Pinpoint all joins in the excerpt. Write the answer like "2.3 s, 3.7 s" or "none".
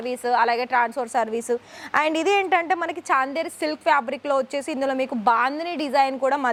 none